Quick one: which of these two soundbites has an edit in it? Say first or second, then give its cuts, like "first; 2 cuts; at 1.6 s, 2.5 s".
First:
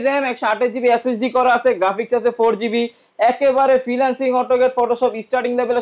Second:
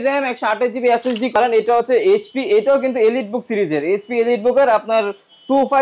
second; 1 cut; at 1.4 s